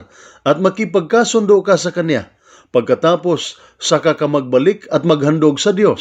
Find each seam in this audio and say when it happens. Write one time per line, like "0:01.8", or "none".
none